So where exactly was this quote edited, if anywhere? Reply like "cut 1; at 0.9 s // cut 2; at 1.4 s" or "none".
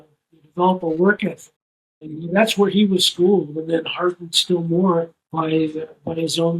cut 1; at 5.2 s

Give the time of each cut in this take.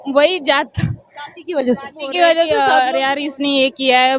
cut 1; at 2.5 s

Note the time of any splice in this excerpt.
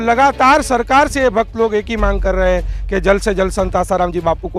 none

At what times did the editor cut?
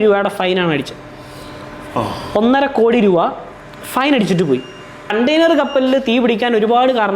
cut 1; at 5.1 s

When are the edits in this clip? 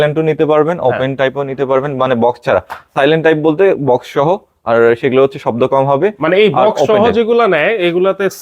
none

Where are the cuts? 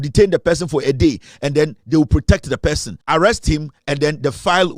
cut 1; at 2.9 s

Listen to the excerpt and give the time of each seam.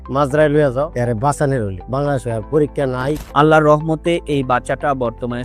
cut 1; at 0.9 s // cut 2; at 3.2 s

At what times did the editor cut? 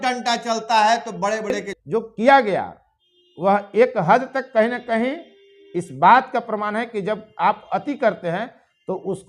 cut 1; at 1.7 s

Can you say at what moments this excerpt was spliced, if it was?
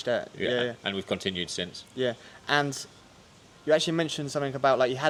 none

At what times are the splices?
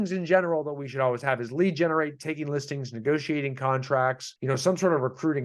cut 1; at 4.3 s

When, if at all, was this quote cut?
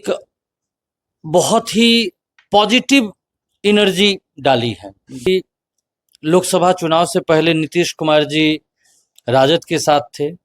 cut 1; at 5.3 s

